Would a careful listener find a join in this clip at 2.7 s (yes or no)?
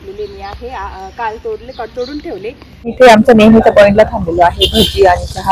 yes